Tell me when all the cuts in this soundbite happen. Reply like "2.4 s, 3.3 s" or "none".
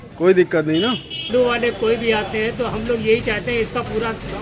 1.3 s